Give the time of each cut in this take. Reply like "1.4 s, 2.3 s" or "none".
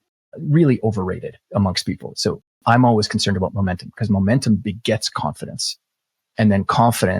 1.3 s, 3.5 s, 5.6 s